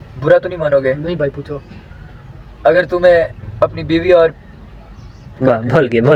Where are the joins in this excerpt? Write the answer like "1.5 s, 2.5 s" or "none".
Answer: none